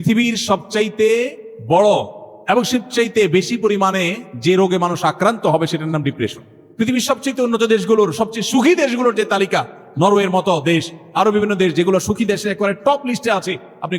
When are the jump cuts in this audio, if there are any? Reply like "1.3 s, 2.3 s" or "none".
6.6 s